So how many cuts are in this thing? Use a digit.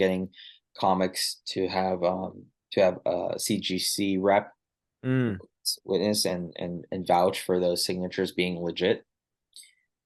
0